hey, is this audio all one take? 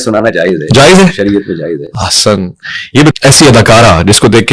no; 1 cut; at 2.9 s

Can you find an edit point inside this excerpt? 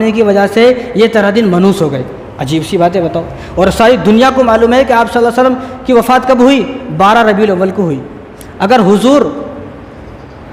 no; 0 cuts

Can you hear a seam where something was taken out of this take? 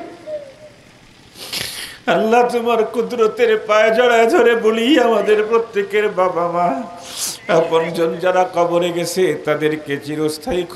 no; 0 cuts

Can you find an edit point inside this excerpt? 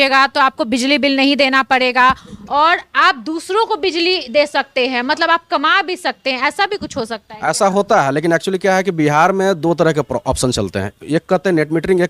no; 0 cuts

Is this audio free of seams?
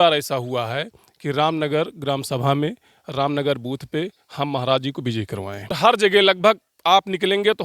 no; 1 cut; at 5.8 s

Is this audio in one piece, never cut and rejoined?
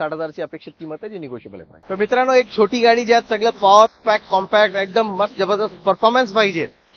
no; 1 cut; at 1.8 s

